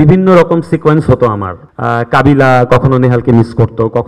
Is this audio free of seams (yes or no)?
yes